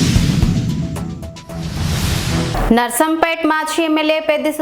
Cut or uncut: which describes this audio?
cut